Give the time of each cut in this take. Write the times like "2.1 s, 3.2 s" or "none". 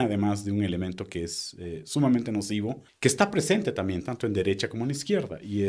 2.8 s